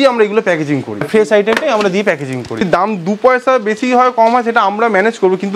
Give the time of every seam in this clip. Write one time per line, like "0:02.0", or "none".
0:01.0
0:02.7